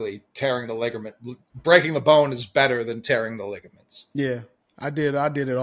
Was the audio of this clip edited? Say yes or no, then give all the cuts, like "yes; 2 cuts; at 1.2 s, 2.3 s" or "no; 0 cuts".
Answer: no; 0 cuts